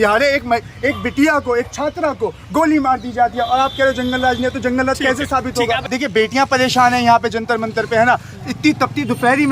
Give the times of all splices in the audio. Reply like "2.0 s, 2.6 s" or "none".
5.9 s